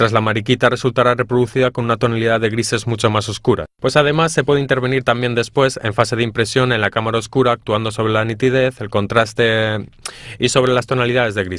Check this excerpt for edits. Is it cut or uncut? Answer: cut